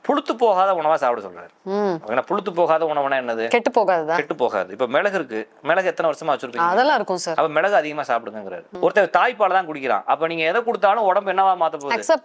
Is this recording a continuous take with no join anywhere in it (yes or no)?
no